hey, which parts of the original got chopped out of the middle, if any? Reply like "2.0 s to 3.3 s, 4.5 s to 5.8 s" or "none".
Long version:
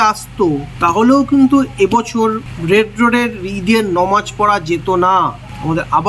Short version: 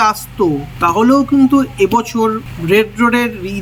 none